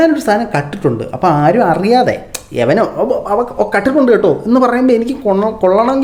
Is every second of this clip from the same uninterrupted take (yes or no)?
yes